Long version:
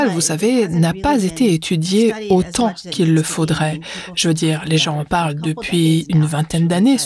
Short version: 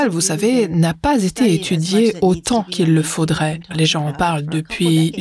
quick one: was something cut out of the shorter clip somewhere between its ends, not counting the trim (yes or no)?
yes